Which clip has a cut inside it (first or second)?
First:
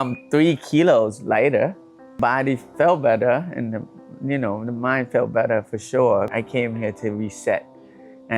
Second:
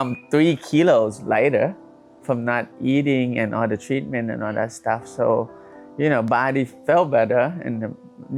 first